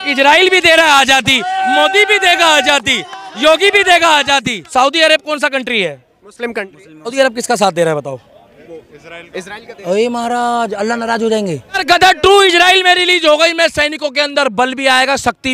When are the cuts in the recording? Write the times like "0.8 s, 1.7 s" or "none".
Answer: 4.6 s, 7.1 s, 11.8 s